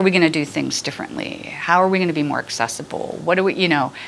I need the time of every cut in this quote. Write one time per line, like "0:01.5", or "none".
none